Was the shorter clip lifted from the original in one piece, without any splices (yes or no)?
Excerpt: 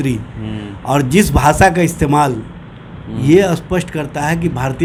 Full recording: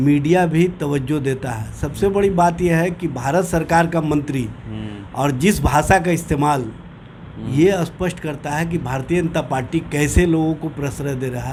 yes